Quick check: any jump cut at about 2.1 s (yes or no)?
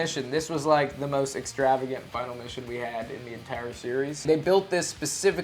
no